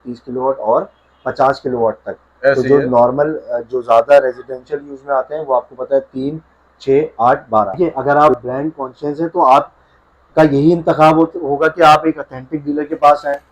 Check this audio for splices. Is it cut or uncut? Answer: cut